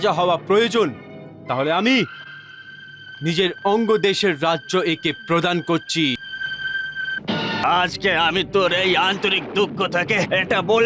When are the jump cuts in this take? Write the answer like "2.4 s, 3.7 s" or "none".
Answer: 7.6 s